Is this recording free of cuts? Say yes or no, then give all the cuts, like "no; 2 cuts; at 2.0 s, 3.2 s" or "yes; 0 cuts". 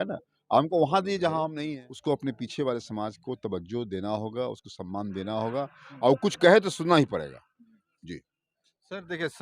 no; 1 cut; at 1.5 s